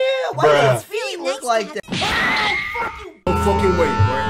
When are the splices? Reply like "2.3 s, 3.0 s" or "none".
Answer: 1.8 s